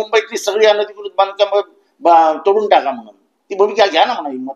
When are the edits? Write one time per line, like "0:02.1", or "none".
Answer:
none